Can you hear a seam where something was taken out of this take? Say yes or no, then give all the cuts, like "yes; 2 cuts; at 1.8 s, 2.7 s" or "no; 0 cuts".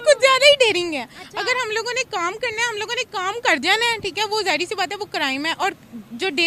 no; 0 cuts